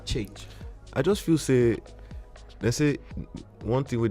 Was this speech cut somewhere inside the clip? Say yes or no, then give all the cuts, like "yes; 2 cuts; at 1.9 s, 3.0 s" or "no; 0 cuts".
no; 0 cuts